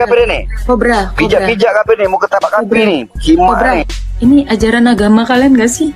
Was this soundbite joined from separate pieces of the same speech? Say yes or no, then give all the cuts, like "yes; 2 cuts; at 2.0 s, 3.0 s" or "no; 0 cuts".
yes; 1 cut; at 4.0 s